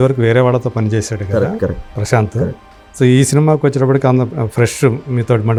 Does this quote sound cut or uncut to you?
uncut